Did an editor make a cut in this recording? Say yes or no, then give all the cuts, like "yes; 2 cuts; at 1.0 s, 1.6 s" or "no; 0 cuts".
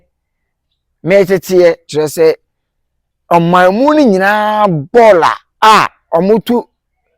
yes; 2 cuts; at 1.9 s, 5.5 s